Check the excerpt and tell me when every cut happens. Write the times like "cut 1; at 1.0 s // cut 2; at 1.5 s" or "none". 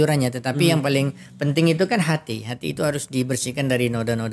none